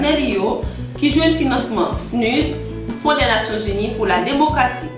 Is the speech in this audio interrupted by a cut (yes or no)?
yes